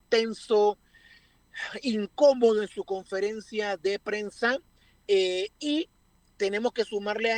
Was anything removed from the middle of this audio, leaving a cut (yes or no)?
no